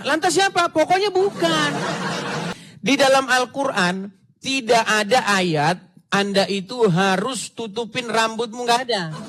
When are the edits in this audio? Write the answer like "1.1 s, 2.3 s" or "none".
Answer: 2.5 s